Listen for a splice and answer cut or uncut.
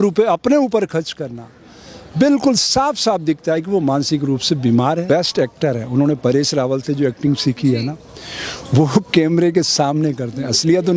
cut